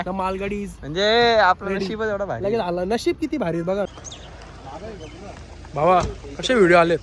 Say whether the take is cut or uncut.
cut